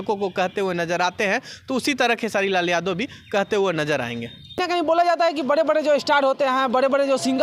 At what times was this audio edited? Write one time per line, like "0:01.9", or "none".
0:04.4